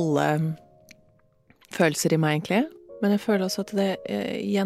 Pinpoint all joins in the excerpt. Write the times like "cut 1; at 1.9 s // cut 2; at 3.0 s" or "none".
cut 1; at 2.8 s